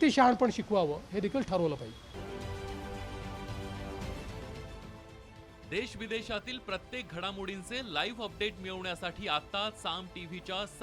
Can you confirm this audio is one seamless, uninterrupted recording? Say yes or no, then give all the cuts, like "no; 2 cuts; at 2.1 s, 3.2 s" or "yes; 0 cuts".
yes; 0 cuts